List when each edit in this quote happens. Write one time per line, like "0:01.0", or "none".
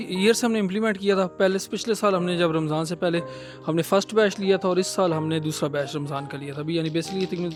none